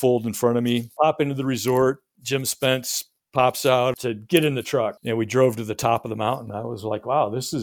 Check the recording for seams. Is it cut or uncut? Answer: cut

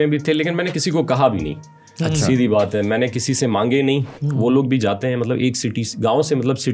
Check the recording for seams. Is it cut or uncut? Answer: cut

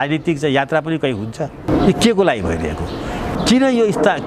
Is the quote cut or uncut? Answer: cut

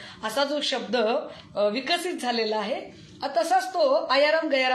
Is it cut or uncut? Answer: uncut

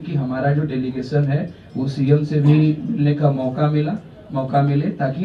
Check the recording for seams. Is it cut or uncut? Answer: uncut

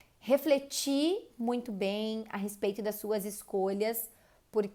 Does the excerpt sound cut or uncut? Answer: uncut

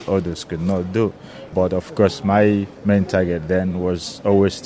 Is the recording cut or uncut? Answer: cut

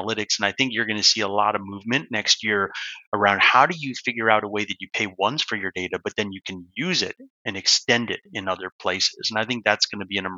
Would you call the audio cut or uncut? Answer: uncut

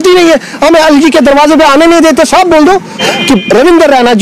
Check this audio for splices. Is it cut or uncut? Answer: cut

